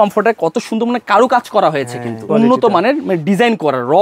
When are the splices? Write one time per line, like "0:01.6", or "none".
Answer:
0:02.3